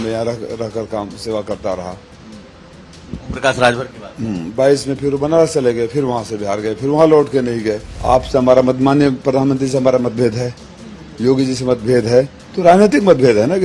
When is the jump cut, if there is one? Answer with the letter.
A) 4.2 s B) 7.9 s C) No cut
B